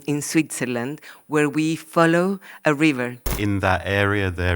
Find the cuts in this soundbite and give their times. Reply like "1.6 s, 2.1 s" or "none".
3.3 s